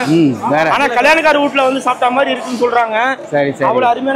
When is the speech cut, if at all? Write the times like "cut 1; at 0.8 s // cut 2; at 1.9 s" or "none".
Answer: none